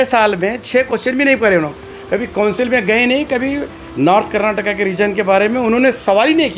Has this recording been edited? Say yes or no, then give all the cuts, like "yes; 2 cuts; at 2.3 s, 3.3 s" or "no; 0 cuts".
no; 0 cuts